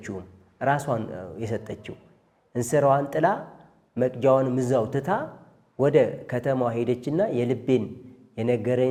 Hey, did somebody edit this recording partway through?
no; 0 cuts

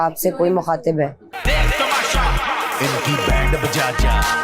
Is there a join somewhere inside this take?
yes; 1 cut; at 1.3 s

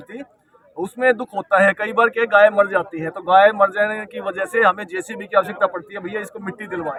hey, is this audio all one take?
yes; 0 cuts

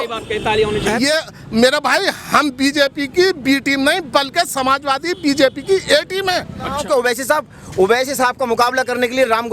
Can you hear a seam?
yes; 2 cuts; at 0.9 s, 6.8 s

